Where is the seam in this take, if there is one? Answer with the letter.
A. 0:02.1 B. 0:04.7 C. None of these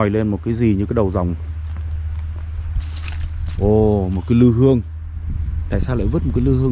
C